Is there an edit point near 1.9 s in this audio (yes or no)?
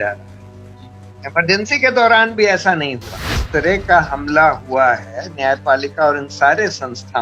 no